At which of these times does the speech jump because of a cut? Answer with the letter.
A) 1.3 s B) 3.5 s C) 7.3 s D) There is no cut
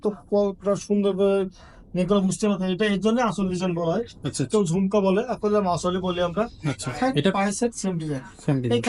C